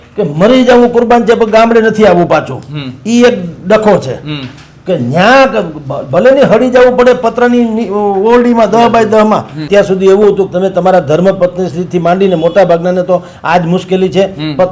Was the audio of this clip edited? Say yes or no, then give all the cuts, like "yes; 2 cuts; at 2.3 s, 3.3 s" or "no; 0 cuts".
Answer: yes; 1 cut; at 9.6 s